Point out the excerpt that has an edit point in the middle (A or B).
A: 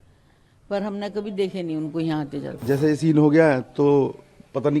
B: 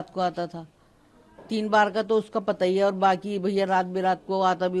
A